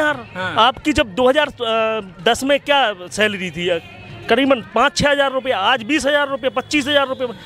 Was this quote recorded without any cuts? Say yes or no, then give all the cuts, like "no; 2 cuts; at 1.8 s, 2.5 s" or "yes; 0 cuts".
yes; 0 cuts